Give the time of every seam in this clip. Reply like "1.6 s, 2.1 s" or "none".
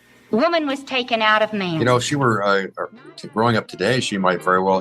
1.8 s